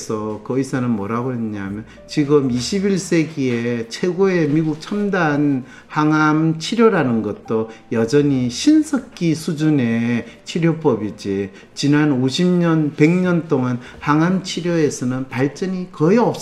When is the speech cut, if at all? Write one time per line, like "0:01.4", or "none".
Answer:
none